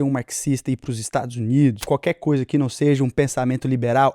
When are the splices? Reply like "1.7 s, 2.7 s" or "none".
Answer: 1.8 s